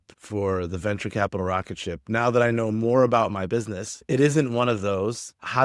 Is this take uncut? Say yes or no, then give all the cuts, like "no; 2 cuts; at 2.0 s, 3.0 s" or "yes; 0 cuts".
yes; 0 cuts